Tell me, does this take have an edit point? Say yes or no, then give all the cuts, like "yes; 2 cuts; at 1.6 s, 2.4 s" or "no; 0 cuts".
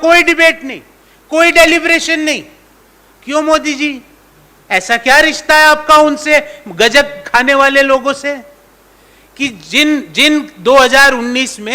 no; 0 cuts